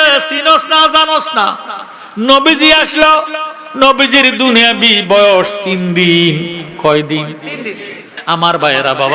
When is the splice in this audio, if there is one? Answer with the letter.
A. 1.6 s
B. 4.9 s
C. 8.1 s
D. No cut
C